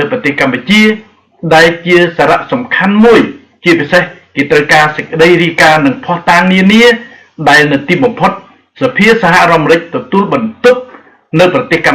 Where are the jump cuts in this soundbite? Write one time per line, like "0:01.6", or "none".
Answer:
none